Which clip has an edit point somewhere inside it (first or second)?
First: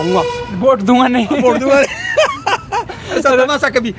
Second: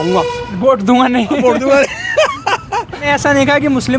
second